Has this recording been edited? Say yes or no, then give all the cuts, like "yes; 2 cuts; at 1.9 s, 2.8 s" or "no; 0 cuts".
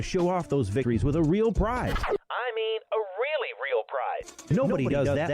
yes; 3 cuts; at 0.8 s, 2.0 s, 3.9 s